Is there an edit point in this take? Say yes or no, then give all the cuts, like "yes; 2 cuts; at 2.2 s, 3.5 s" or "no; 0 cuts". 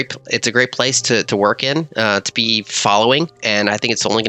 yes; 1 cut; at 3.4 s